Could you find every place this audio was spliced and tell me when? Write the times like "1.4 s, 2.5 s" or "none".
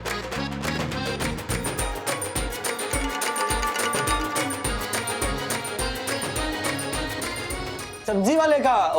1.5 s, 8.0 s

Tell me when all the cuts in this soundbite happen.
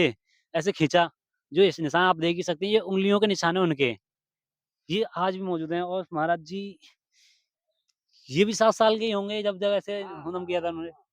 none

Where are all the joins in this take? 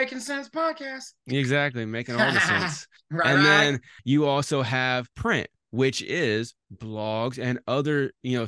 3.9 s, 5.1 s

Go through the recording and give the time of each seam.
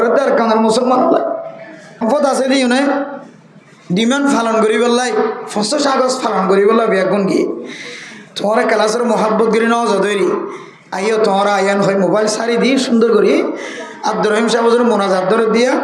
2.0 s

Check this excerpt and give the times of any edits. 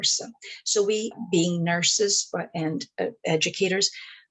1.2 s

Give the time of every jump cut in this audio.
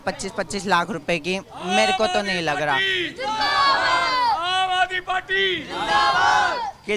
none

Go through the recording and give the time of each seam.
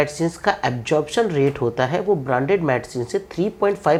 none

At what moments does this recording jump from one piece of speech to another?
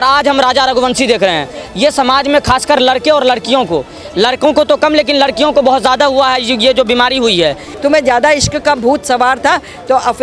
7.7 s

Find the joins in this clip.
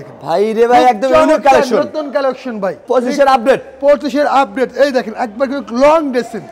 none

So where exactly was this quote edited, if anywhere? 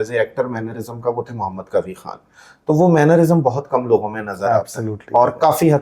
none

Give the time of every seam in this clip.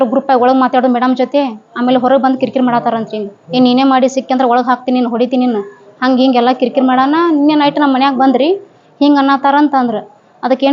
none

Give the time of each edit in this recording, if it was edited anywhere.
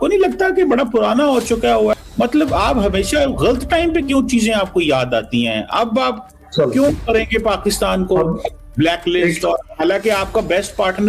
1.9 s

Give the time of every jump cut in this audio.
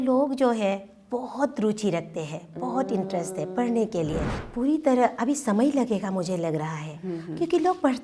4.3 s

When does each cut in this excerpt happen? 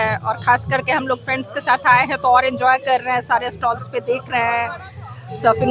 none

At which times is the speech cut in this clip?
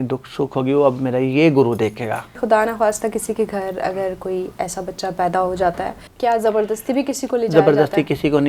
2.4 s, 6.0 s

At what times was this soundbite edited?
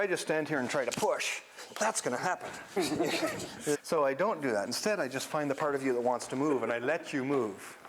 2.8 s, 3.8 s

